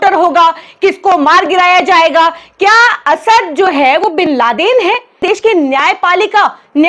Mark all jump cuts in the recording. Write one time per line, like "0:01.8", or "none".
0:05.2